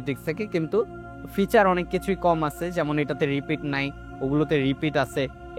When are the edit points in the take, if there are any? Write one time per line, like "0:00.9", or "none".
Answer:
none

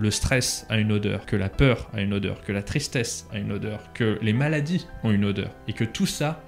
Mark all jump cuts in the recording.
0:01.2
0:04.9
0:05.6

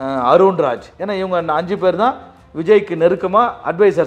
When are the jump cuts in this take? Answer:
0:00.9

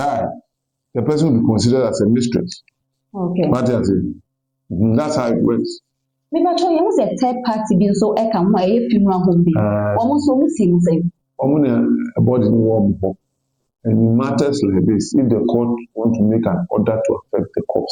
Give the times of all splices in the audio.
none

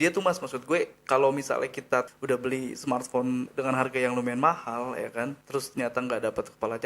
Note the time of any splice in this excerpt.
0:02.1
0:03.5
0:05.4

